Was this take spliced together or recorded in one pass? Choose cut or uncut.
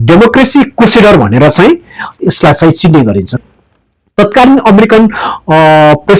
cut